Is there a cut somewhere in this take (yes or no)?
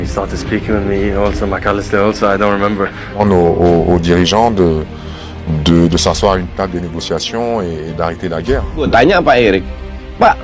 no